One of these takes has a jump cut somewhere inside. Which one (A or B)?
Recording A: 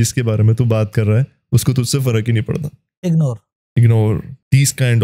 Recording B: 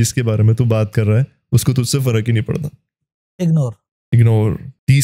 A